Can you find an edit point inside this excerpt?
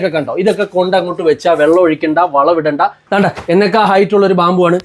yes; 1 cut; at 3.0 s

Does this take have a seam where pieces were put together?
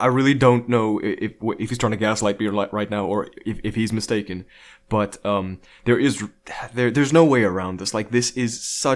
no; 0 cuts

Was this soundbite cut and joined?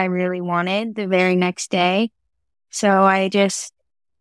no; 0 cuts

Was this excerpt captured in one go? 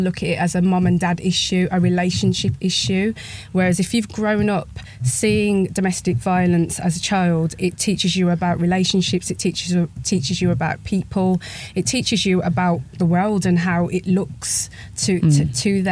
yes; 0 cuts

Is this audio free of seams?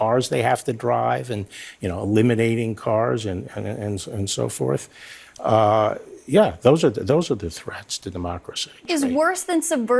no; 1 cut; at 8.9 s

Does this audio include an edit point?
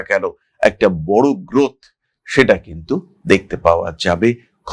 no; 0 cuts

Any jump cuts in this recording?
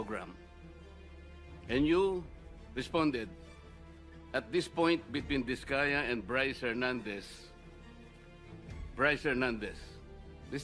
yes; 2 cuts; at 7.2 s, 9.0 s

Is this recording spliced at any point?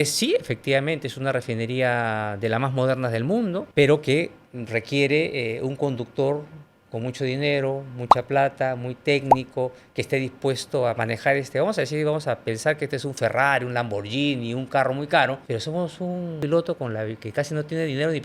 yes; 1 cut; at 16.4 s

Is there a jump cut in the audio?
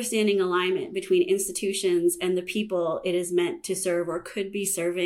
no; 0 cuts

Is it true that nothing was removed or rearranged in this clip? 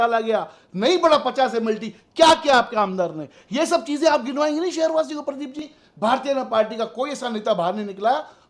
no; 1 cut; at 5.7 s

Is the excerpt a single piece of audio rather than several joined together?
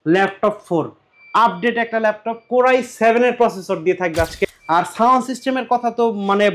no; 1 cut; at 4.4 s

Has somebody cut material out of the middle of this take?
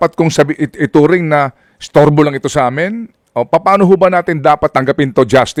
no; 0 cuts

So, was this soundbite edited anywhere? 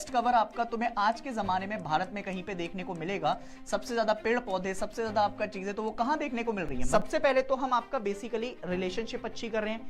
yes; 1 cut; at 6.8 s

